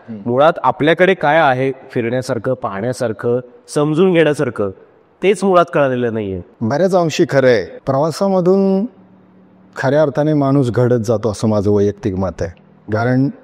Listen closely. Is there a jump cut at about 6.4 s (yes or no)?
yes